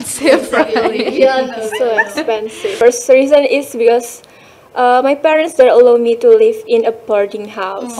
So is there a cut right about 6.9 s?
no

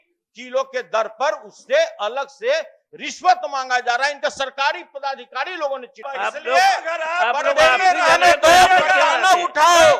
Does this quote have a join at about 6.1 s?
yes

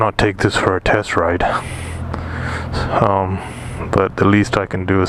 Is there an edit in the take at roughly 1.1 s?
no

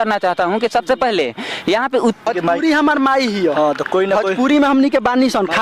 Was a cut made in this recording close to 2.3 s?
yes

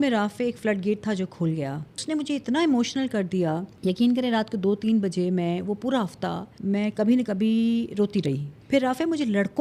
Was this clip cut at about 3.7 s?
yes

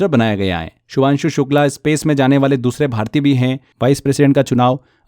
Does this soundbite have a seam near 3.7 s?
yes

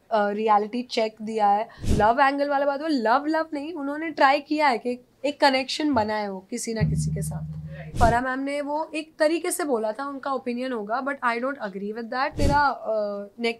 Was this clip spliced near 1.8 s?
yes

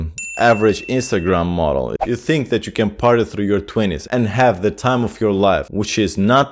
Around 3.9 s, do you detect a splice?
no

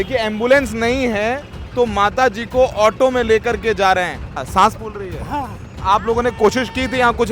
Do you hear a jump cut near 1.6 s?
no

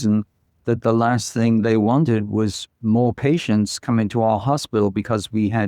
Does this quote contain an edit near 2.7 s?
yes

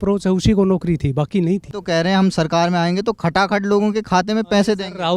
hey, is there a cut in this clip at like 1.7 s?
yes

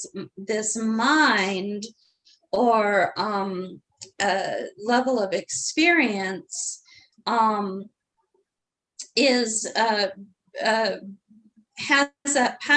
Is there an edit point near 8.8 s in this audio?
no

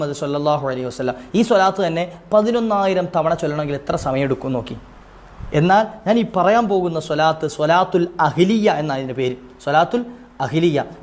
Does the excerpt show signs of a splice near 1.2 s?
yes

